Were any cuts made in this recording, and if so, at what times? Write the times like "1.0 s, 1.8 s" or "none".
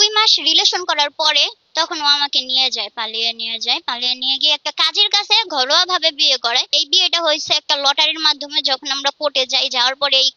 1.6 s, 6.8 s